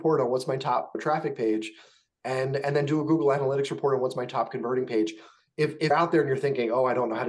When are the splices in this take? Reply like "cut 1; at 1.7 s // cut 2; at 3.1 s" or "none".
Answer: cut 1; at 1.0 s // cut 2; at 5.9 s

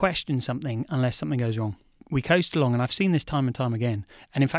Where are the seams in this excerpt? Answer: cut 1; at 2.0 s

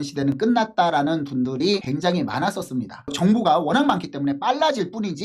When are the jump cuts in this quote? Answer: cut 1; at 3.0 s

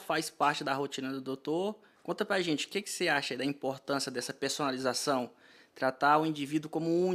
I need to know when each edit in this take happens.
none

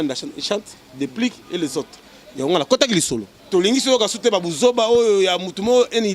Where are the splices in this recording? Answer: cut 1; at 3.3 s

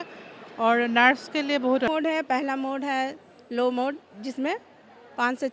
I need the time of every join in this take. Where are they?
cut 1; at 1.9 s

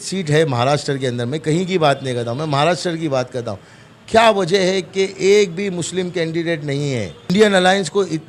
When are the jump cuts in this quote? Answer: cut 1; at 7.3 s

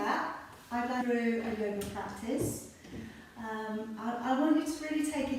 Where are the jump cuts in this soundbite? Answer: cut 1; at 1.0 s

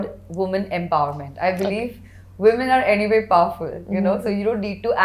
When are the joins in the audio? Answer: none

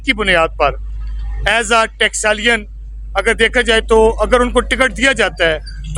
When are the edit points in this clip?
none

